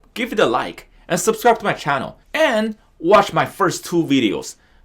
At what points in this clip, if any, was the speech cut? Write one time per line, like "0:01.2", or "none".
0:02.2